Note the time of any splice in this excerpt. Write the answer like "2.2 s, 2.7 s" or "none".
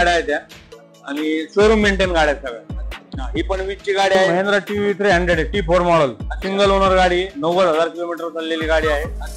4.3 s